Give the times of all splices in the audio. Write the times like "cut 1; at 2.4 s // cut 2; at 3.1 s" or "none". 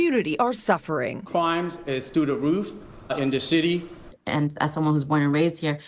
cut 1; at 4.0 s